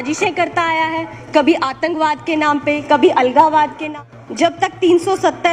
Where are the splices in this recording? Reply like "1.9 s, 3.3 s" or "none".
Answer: 3.8 s